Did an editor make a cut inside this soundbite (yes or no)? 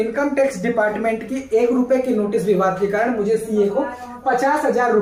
no